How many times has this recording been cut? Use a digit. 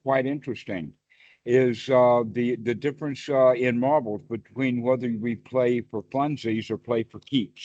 0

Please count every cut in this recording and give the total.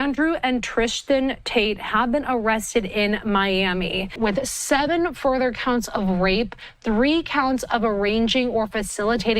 1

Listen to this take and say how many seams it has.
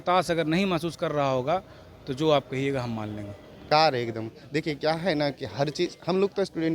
1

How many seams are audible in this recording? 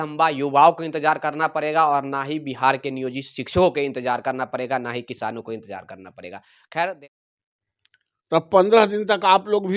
1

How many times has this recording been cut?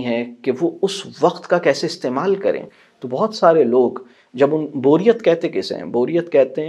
0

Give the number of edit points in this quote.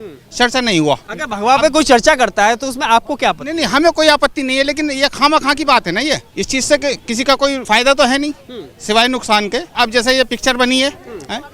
4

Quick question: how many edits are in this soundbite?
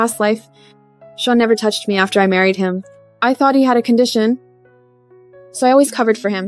0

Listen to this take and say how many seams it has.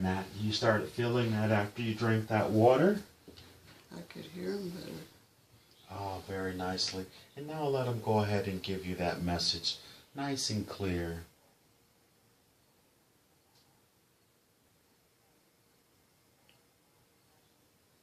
1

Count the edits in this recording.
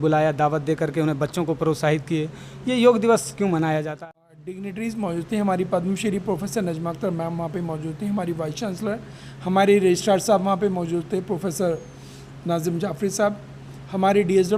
1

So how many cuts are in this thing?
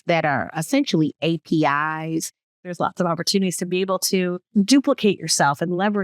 2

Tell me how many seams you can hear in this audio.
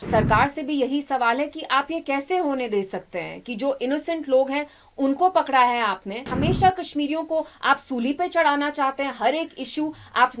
1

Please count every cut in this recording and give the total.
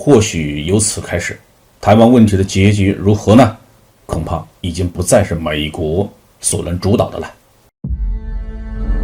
1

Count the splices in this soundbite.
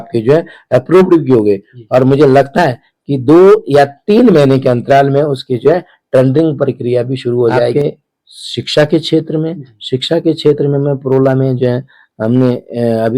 1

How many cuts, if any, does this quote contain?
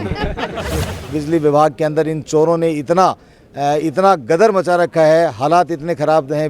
1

